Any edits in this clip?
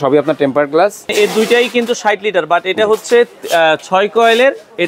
yes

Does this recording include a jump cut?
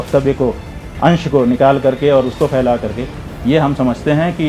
no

